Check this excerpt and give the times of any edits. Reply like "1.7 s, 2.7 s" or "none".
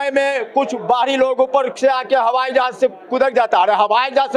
none